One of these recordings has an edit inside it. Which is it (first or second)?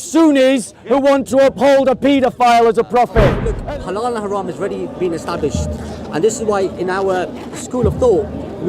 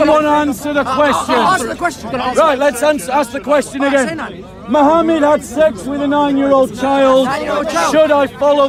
first